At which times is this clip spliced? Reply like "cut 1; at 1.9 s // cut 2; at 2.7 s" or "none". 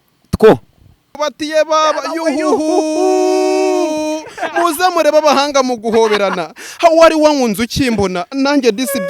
cut 1; at 1.1 s